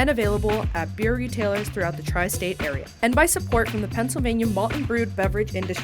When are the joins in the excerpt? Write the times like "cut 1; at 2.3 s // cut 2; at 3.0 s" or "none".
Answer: cut 1; at 2.9 s